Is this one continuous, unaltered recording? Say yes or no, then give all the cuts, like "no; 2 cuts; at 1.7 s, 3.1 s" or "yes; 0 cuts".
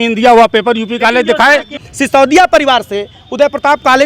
no; 1 cut; at 1.8 s